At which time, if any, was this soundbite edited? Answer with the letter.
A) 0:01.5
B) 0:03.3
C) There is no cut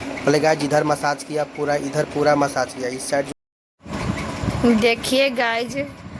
B